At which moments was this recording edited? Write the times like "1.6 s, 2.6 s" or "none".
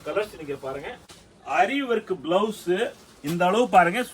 1.5 s